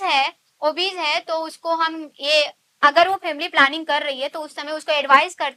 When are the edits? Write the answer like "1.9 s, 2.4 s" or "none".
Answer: none